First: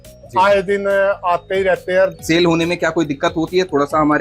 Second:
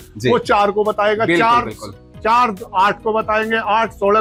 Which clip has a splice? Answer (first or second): first